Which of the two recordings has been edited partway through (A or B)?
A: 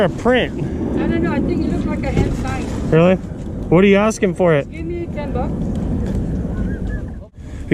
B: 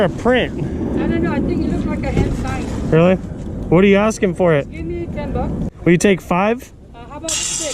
B